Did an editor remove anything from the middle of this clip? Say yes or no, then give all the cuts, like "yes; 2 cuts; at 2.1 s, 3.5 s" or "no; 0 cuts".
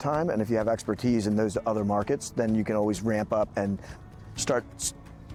no; 0 cuts